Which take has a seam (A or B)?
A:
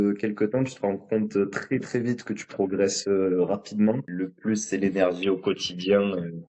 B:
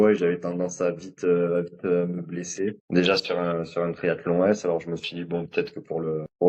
A